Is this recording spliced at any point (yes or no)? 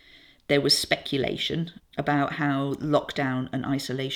yes